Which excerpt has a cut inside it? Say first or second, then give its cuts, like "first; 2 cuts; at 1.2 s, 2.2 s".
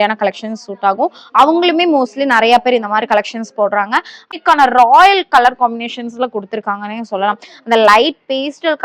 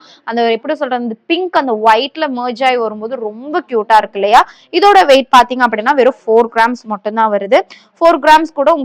first; 1 cut; at 4.2 s